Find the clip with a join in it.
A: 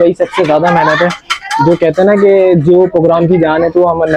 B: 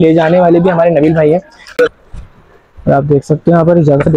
B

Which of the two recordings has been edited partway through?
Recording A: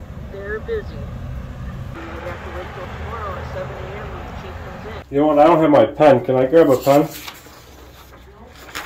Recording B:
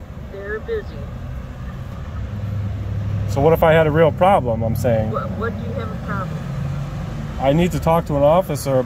A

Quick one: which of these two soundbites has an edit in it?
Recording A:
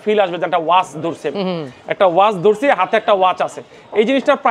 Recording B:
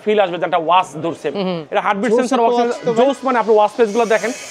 B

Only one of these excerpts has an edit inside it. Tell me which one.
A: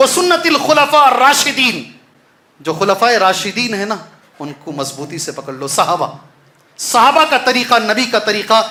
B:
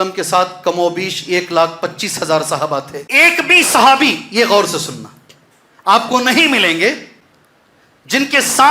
B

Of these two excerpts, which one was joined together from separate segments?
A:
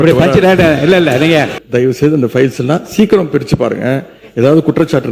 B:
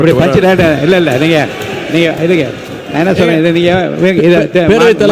A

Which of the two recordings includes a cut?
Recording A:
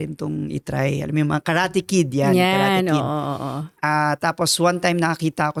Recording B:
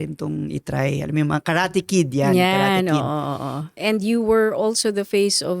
B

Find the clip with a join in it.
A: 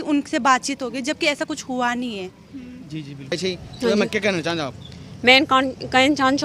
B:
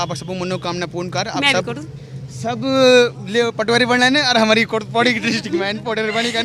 A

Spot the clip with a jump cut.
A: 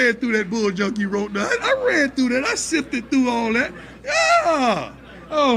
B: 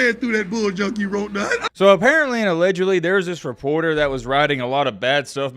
B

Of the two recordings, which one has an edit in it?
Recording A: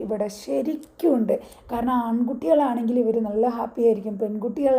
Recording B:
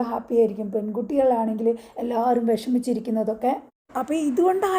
B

